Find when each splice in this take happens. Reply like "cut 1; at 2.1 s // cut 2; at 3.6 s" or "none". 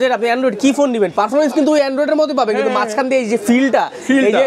none